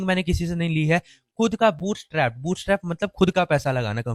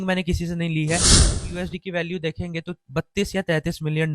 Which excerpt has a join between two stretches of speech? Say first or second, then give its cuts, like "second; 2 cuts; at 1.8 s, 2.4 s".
second; 1 cut; at 1.4 s